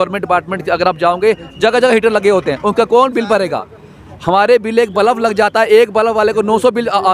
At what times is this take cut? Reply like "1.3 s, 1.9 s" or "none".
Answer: none